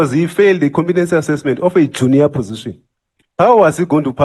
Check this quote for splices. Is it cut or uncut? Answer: uncut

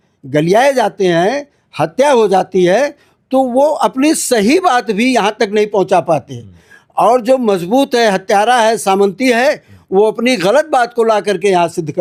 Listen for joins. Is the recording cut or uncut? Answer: uncut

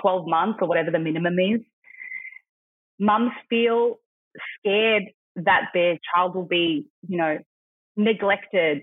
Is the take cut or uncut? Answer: uncut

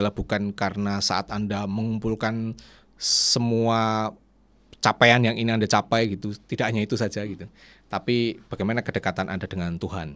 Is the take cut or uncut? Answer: uncut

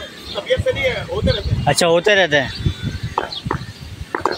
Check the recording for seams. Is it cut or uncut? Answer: uncut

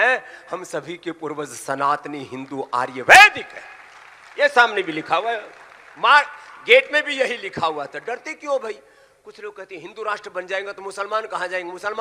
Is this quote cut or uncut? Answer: uncut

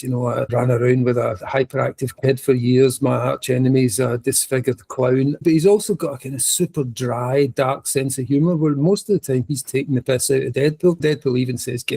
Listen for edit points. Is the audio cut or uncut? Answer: cut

